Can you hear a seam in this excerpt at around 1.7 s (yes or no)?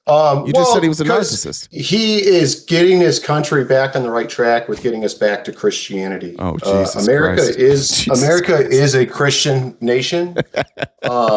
yes